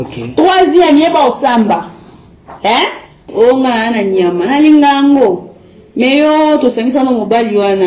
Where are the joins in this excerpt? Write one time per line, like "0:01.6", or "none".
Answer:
0:03.3